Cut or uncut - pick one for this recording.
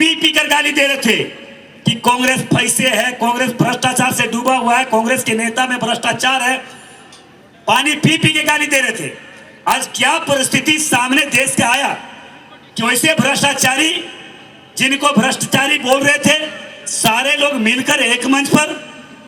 uncut